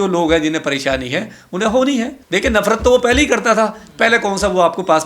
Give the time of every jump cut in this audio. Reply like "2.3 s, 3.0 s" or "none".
2.2 s